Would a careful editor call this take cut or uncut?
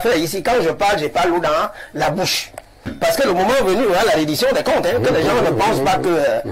cut